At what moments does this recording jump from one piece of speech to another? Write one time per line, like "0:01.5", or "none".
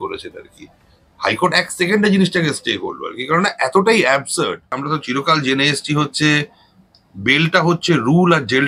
0:04.8

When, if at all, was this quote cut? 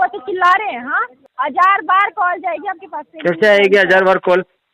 0:01.2

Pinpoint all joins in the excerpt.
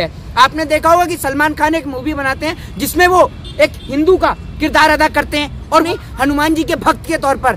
0:05.8

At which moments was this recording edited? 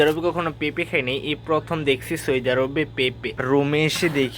0:03.3

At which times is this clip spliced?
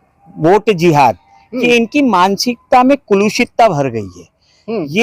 none

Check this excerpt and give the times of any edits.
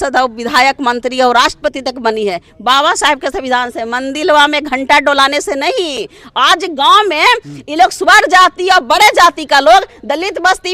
none

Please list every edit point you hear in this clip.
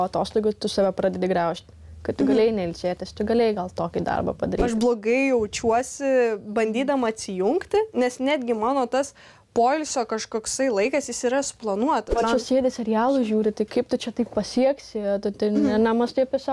0:04.7
0:12.1

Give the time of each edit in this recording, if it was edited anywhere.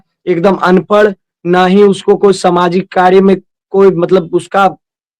none

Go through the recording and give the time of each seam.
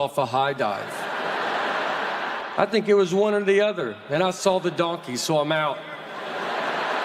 0:02.4

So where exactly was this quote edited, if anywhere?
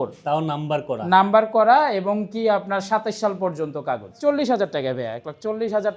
0:04.2

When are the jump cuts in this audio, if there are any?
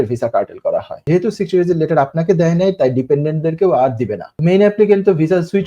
0:01.0
0:04.3

